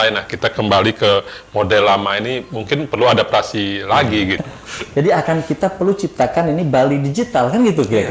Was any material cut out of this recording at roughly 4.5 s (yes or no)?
yes